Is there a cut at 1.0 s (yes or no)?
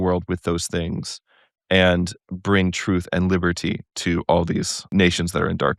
no